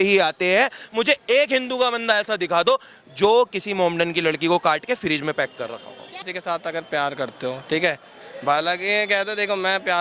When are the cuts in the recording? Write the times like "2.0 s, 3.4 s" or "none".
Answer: 6.2 s